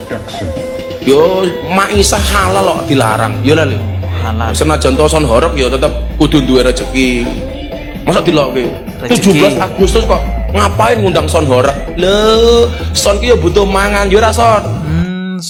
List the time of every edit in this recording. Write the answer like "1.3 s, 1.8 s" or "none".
none